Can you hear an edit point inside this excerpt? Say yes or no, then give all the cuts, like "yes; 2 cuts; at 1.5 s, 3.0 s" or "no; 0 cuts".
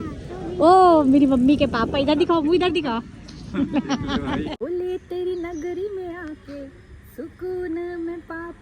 yes; 1 cut; at 4.6 s